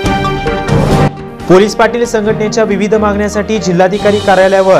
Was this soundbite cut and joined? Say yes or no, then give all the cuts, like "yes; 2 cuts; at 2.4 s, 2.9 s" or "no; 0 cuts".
yes; 1 cut; at 1.0 s